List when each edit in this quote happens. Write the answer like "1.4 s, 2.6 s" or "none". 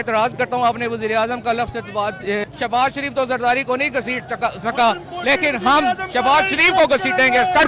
2.4 s